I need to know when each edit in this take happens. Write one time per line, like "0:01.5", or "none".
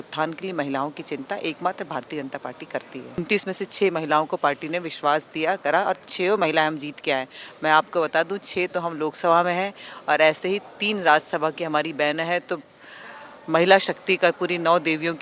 0:03.2